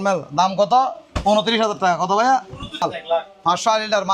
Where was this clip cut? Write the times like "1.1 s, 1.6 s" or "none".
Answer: 2.8 s